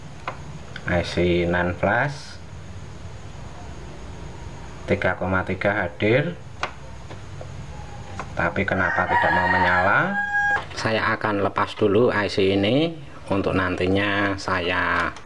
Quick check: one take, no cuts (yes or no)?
no